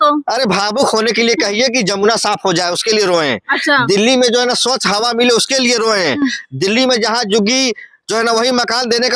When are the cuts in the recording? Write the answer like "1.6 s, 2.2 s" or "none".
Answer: none